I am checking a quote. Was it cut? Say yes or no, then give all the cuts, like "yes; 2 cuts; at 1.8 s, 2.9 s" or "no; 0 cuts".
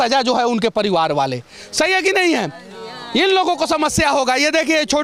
no; 0 cuts